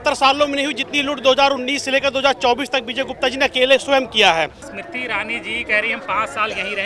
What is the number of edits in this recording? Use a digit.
1